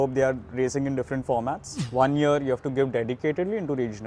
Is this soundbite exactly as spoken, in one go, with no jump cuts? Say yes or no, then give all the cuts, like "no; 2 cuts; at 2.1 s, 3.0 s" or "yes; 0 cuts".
no; 1 cut; at 1.7 s